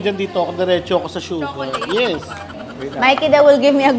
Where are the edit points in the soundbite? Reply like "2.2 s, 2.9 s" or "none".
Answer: 2.5 s